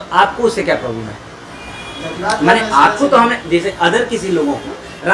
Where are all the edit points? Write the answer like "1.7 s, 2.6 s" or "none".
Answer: none